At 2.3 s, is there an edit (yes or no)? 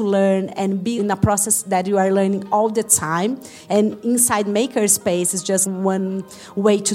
no